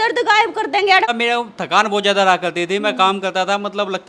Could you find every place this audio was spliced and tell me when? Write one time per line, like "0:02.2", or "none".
0:01.1